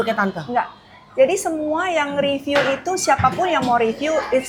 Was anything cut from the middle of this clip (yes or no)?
no